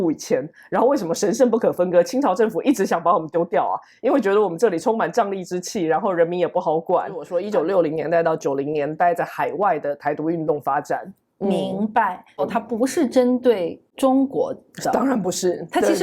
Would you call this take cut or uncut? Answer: cut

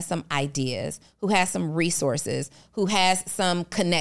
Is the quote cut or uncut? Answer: uncut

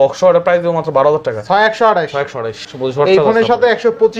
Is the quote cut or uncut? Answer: cut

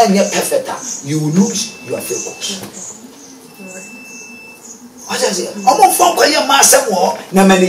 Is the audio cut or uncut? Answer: uncut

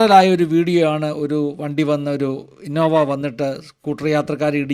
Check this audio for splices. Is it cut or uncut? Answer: uncut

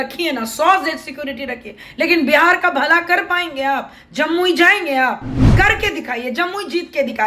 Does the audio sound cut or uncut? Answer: cut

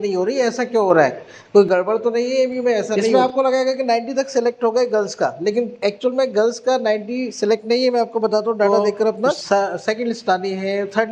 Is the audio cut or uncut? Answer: cut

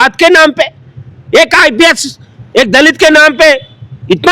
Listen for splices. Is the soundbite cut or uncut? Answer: uncut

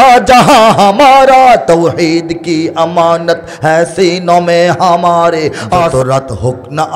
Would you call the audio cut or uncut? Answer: cut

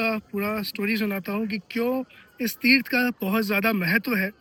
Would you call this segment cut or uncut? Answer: uncut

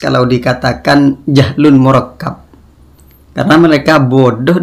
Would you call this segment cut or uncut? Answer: uncut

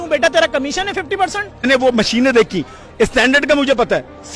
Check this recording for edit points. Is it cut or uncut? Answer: cut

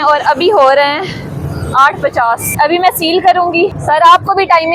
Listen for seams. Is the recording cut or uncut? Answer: cut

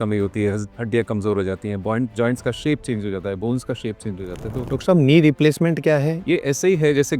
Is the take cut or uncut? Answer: cut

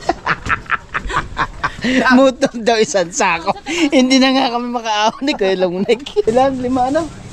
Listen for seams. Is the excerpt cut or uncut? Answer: cut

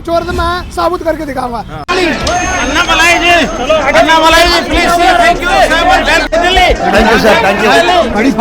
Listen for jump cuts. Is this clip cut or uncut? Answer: cut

